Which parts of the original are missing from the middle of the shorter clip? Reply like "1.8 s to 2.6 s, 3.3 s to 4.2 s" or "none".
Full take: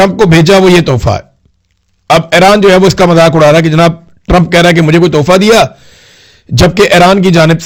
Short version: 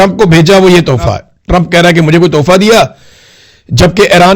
1.3 s to 4.1 s